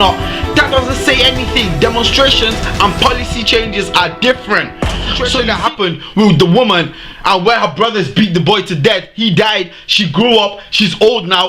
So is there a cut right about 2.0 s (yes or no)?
no